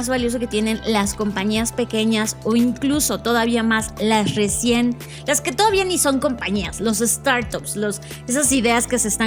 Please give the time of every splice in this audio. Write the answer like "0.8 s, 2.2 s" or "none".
none